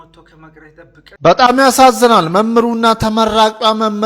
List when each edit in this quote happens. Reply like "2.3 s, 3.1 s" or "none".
1.1 s